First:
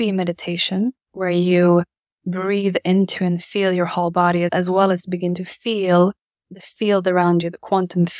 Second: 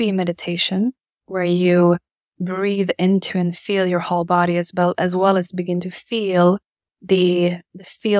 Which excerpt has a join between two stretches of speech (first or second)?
first